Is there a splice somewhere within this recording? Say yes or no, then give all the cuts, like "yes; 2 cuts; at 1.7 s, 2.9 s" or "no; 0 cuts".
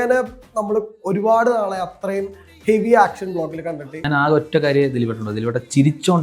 yes; 1 cut; at 4.0 s